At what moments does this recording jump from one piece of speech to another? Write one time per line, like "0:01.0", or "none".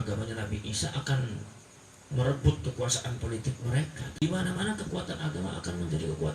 0:04.2